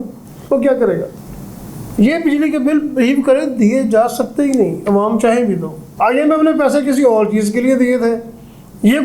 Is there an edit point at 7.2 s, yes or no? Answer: no